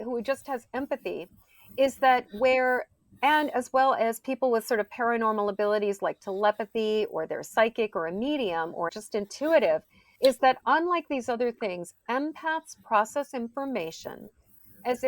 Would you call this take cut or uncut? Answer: cut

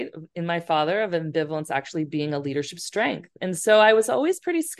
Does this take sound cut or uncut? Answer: uncut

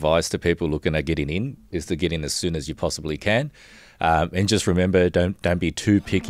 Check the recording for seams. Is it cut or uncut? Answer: uncut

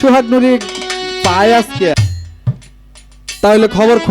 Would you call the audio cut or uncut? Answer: cut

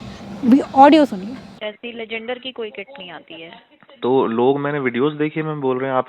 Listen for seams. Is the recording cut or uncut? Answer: cut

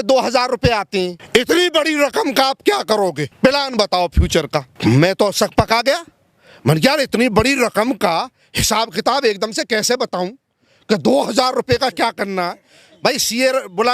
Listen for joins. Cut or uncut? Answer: cut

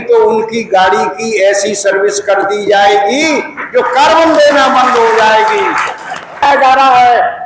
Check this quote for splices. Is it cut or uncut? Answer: cut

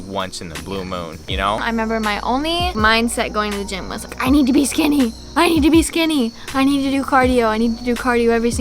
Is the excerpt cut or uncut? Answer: cut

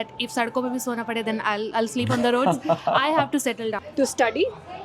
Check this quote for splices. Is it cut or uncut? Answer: cut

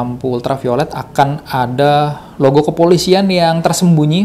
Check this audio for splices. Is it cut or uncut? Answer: uncut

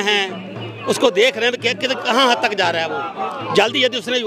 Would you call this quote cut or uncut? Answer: uncut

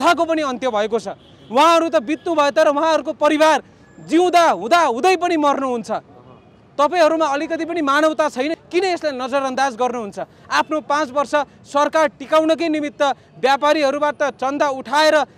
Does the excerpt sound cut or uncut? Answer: cut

